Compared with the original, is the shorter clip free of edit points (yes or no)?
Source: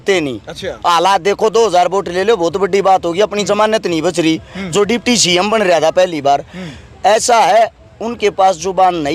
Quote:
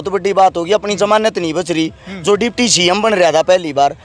yes